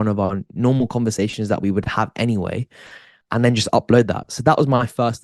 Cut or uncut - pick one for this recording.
cut